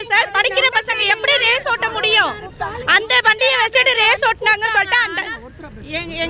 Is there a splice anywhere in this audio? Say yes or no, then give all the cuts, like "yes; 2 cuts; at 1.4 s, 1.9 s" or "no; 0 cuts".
no; 0 cuts